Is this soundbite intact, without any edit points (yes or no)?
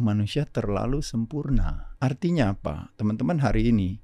no